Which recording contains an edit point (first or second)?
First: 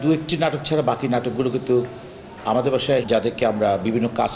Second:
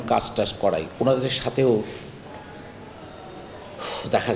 first